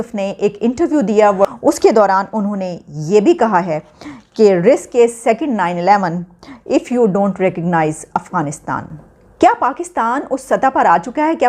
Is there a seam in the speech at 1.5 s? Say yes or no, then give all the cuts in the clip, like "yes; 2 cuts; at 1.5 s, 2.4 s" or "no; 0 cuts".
yes; 2 cuts; at 1.5 s, 9.1 s